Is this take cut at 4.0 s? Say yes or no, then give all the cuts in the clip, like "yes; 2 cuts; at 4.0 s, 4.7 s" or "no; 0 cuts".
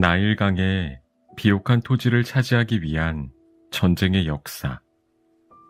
no; 0 cuts